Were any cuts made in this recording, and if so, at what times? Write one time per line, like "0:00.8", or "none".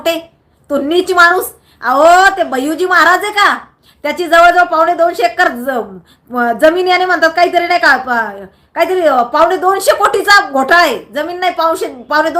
none